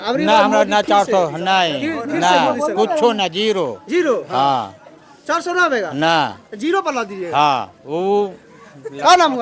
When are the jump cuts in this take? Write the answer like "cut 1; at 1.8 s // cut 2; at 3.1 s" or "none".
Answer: none